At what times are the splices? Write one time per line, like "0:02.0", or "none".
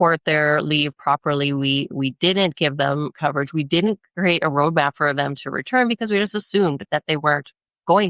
none

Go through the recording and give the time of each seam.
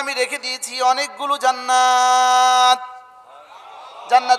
none

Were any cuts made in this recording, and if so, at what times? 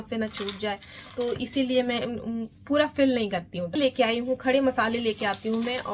0:03.7

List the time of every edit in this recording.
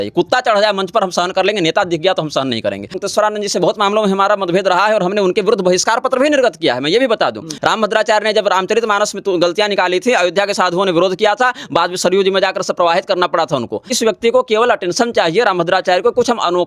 0:03.0
0:07.5
0:14.0

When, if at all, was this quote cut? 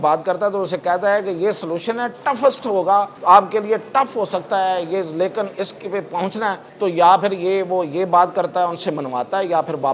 0:03.1
0:06.7

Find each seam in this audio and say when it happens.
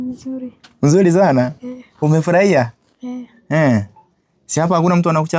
none

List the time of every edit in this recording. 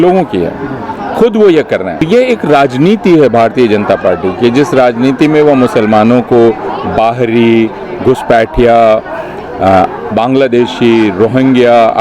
0:02.1

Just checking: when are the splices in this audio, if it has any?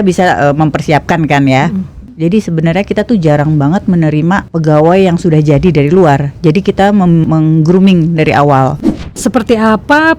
0:02.0
0:08.8

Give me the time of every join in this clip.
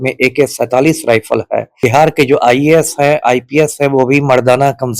0:01.8

